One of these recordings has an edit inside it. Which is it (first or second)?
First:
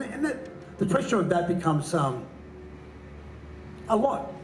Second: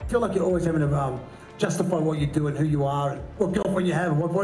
second